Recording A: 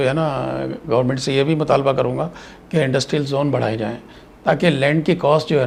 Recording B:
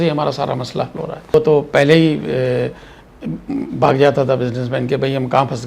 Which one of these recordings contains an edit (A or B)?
B